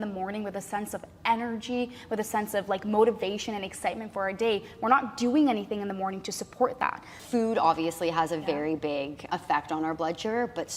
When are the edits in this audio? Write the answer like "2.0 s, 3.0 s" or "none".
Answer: 7.1 s, 9.2 s